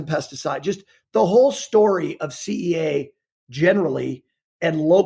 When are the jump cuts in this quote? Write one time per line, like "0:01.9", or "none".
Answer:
none